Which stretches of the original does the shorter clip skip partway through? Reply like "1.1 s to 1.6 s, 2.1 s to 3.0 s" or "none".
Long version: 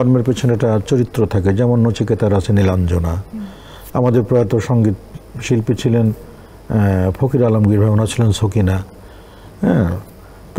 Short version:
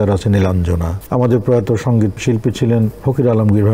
3.2 s to 3.8 s, 5.0 s to 5.4 s, 6.2 s to 7.2 s